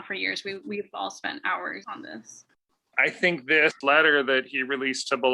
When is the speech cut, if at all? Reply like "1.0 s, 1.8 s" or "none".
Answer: 1.8 s, 2.9 s, 3.8 s